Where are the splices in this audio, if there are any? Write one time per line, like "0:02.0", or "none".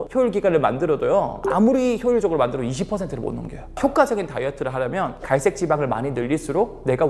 0:01.4
0:03.8

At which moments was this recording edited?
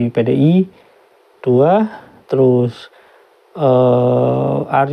none

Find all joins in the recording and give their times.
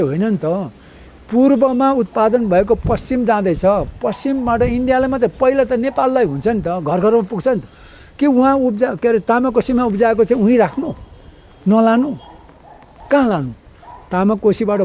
none

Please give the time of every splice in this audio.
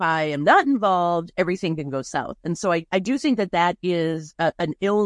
0:02.9

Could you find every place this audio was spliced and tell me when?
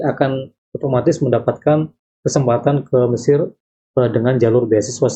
none

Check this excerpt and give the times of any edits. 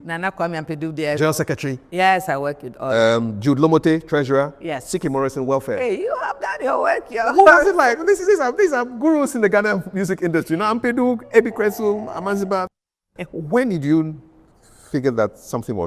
0:12.7

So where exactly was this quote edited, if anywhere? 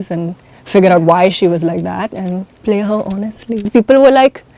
0:02.5
0:03.7

